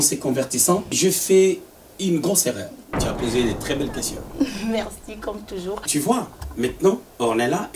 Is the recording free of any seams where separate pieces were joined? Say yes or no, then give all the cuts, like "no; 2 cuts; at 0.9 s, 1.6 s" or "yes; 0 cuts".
no; 2 cuts; at 2.9 s, 5.9 s